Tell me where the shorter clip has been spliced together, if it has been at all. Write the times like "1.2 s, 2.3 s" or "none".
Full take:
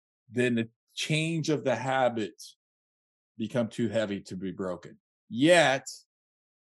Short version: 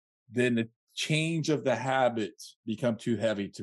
2.5 s